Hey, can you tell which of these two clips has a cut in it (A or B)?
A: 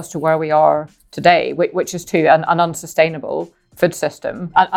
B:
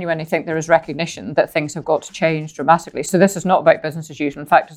B